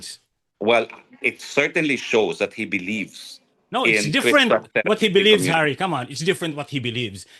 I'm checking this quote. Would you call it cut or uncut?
uncut